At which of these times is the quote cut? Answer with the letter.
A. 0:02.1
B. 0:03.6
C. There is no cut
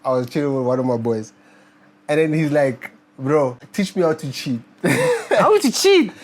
B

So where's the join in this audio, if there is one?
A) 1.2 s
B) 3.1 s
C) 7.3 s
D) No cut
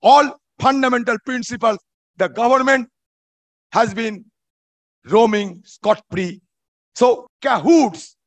C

